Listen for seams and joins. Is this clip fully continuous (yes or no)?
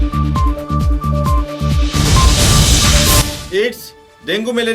no